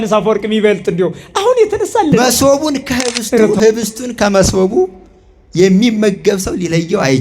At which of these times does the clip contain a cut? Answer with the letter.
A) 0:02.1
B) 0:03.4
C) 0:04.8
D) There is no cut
A